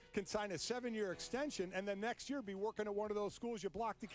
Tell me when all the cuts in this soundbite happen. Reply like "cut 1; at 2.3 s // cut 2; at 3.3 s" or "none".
none